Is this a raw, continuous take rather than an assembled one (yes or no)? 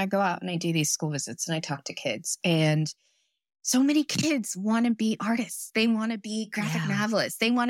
yes